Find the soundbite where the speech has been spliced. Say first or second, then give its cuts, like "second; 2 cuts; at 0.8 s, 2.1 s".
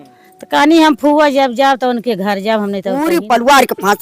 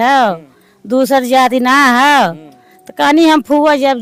first; 1 cut; at 2.9 s